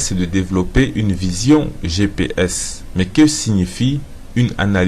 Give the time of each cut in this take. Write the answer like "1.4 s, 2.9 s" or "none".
1.8 s